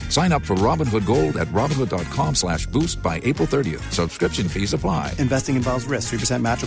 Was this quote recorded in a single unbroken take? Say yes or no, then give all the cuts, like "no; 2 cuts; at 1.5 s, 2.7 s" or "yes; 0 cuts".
yes; 0 cuts